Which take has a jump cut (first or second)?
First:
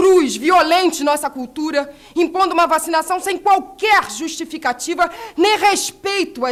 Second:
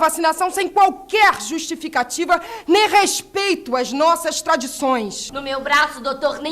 second